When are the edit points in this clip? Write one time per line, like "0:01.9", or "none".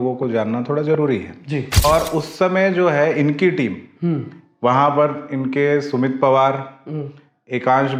0:01.8